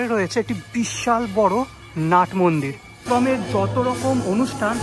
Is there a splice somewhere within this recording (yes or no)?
yes